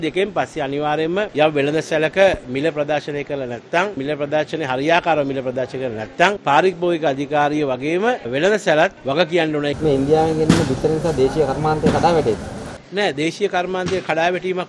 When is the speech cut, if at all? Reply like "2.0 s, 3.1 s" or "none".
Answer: 1.3 s, 4.0 s, 6.4 s, 9.4 s